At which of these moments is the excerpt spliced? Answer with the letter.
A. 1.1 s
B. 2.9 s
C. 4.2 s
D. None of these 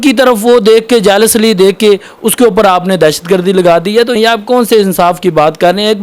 C